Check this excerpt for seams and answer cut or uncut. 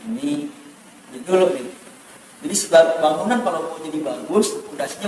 cut